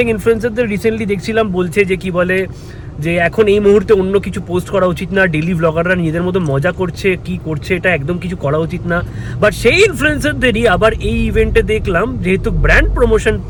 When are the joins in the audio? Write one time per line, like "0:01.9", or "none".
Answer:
none